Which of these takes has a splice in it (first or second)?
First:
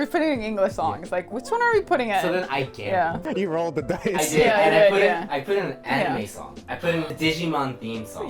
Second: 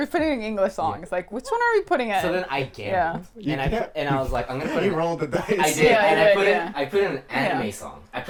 first